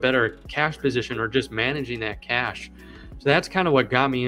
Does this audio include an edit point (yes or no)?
no